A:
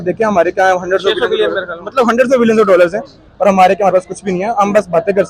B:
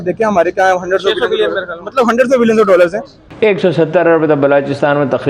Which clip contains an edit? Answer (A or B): B